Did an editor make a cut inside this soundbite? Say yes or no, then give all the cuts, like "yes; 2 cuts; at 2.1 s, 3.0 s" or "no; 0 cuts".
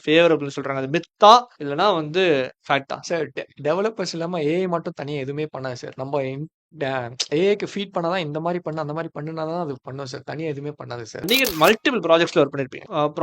yes; 1 cut; at 11.3 s